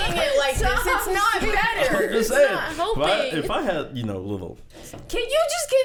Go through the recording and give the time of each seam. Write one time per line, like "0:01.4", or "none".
none